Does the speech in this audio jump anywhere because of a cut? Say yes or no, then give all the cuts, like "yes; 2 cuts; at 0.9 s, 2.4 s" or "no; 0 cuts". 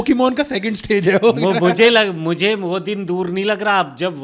no; 0 cuts